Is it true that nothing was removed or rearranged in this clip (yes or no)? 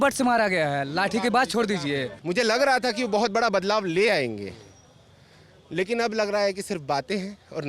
no